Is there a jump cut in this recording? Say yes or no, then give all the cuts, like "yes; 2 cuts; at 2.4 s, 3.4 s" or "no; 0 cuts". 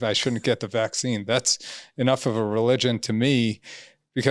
no; 0 cuts